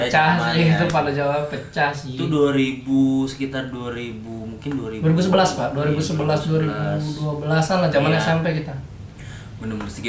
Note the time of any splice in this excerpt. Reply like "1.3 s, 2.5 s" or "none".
none